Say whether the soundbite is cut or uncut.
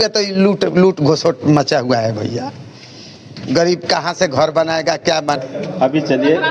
cut